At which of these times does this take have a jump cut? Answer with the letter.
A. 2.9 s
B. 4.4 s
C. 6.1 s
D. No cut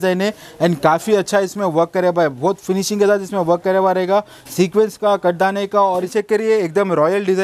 C